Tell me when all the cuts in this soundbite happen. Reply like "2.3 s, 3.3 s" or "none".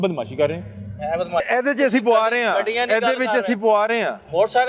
1.5 s